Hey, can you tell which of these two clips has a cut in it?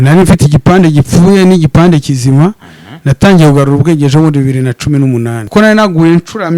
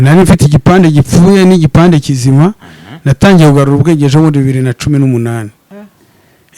first; 1 cut; at 5.4 s

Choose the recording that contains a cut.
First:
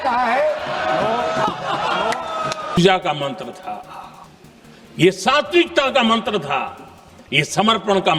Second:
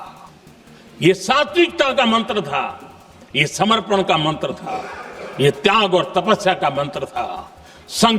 first; 1 cut; at 2.8 s

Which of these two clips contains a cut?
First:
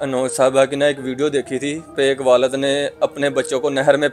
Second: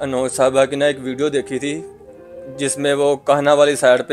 first; 1 cut; at 1.9 s

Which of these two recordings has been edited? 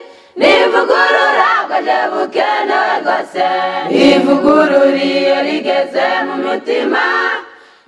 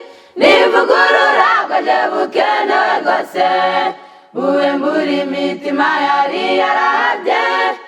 second; 1 cut; at 3.7 s

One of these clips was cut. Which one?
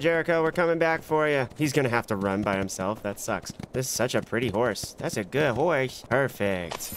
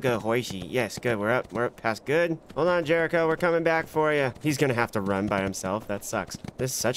first; 1 cut; at 6.0 s

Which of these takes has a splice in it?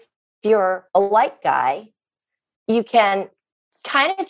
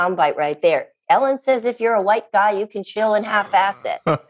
first; 1 cut; at 1.1 s

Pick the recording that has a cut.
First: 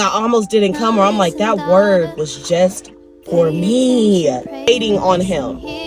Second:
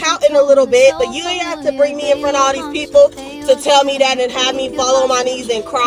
first; 1 cut; at 4.6 s

